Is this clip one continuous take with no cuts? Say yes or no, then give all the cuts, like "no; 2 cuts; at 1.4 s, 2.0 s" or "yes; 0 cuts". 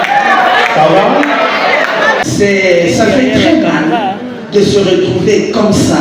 no; 1 cut; at 2.2 s